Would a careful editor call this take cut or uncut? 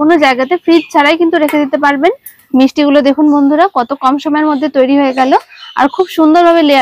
cut